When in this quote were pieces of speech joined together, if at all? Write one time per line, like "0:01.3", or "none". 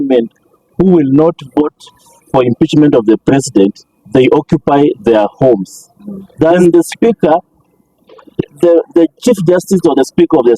0:06.6